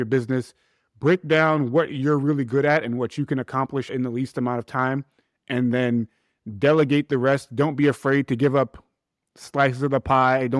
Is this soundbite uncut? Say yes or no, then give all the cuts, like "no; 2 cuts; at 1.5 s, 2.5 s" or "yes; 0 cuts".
yes; 0 cuts